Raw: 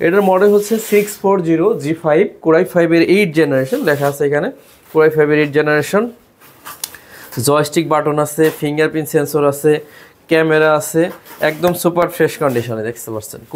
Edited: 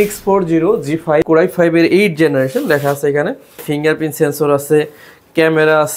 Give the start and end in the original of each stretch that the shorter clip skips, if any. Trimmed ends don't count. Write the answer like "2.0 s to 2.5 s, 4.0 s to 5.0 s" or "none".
2.2 s to 2.4 s, 4.8 s to 8.6 s